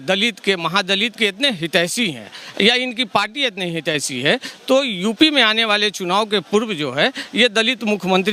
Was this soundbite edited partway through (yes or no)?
no